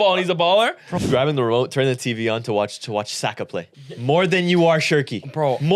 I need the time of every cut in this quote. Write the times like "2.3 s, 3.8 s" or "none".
1.0 s, 4.0 s

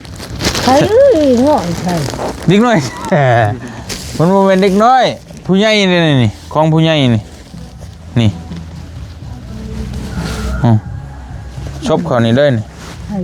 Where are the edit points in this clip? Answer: none

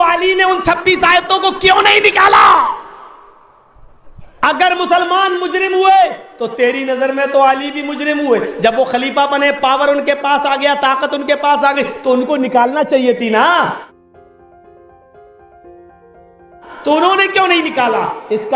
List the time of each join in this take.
3.7 s, 13.8 s, 16.7 s

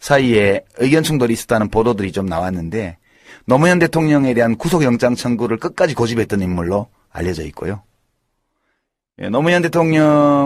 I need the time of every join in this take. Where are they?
1.1 s

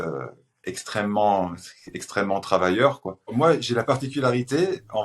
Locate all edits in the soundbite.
3.3 s

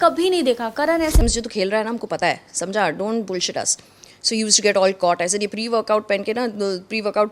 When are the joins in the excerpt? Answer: 1.2 s

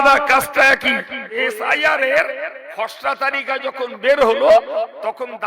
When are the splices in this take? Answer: 1.4 s

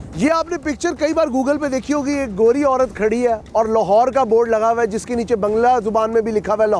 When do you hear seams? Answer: none

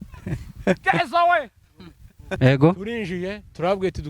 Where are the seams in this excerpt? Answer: 2.4 s

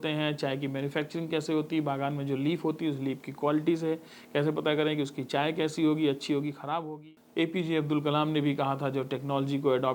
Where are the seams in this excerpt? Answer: 6.8 s

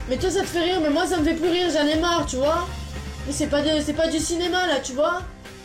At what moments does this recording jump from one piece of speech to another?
3.2 s

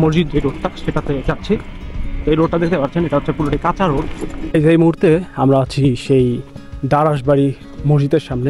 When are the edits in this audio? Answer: 4.4 s

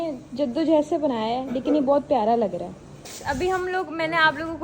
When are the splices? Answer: 3.0 s

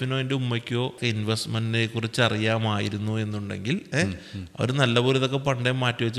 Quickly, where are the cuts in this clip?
1.0 s

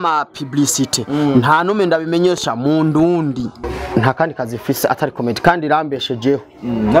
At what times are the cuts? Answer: 3.6 s

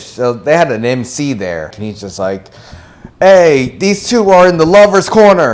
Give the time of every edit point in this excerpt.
1.8 s

